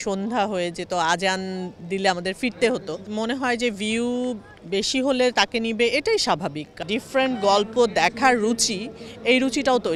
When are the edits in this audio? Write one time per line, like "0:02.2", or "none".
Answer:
0:03.0
0:06.7